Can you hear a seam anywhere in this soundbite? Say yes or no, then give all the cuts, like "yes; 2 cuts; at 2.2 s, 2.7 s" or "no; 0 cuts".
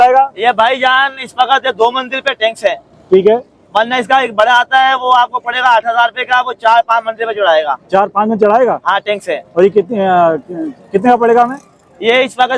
no; 0 cuts